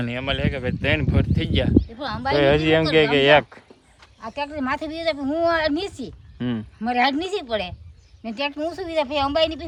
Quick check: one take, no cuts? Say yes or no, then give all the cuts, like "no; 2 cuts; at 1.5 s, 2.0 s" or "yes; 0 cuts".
yes; 0 cuts